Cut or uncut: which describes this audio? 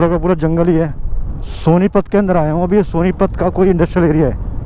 uncut